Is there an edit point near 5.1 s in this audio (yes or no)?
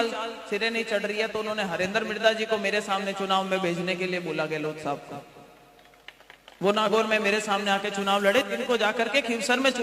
no